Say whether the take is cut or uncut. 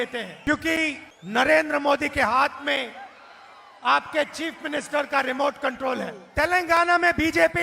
cut